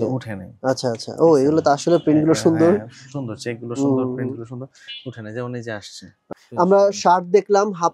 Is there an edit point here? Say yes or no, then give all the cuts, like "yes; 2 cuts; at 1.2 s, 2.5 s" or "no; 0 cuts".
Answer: yes; 1 cut; at 6.1 s